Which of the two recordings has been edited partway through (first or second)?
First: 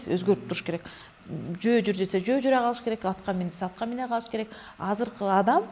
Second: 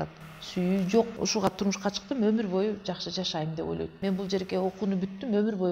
second